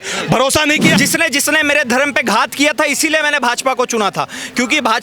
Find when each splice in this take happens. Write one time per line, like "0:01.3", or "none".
0:00.9

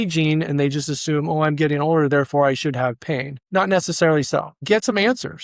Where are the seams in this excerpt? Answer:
0:03.3
0:04.6

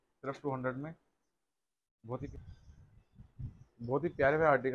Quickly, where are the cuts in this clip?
0:02.3

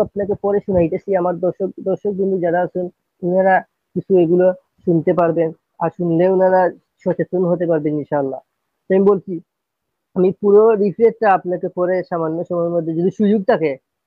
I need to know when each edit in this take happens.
none

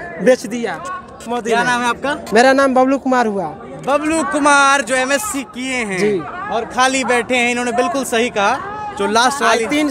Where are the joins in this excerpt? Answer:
none

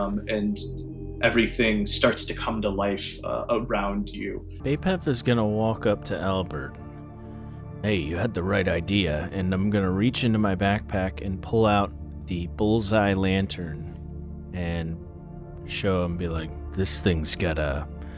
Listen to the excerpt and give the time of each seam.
0:04.5

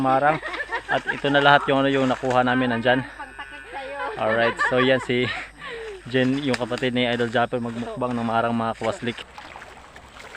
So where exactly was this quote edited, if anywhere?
0:09.2

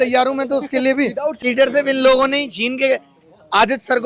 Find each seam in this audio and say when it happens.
0:01.4

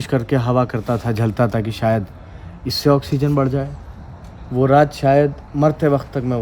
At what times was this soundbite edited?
0:05.4

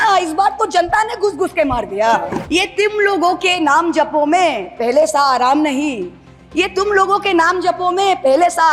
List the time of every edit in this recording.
0:02.4

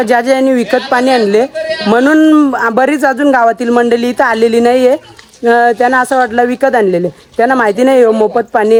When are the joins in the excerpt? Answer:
none

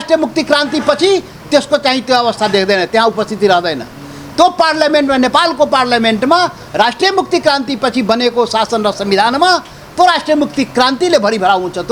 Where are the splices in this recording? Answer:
none

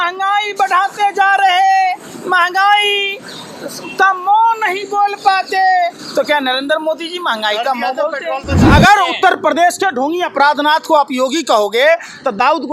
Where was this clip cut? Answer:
0:08.6

